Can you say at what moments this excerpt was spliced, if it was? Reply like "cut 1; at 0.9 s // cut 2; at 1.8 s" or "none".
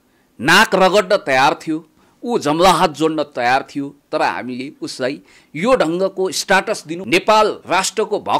cut 1; at 6.9 s

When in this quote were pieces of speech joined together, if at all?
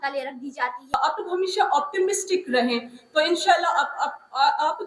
cut 1; at 0.9 s

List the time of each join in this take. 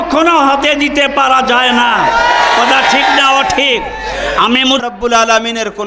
cut 1; at 4.8 s

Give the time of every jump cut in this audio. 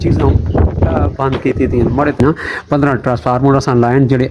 cut 1; at 2.2 s

